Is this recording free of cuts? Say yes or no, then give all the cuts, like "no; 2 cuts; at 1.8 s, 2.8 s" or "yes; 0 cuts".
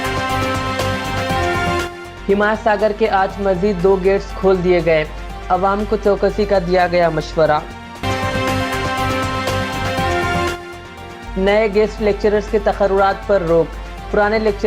no; 1 cut; at 1.8 s